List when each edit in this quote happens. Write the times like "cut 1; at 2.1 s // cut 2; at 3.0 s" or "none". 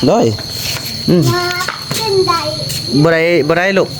none